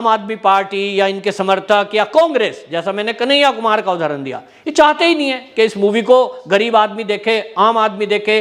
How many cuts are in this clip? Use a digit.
0